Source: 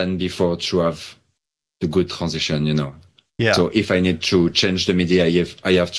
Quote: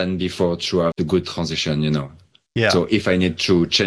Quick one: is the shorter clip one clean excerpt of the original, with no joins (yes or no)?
no